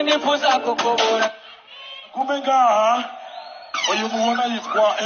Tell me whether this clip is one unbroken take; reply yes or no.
no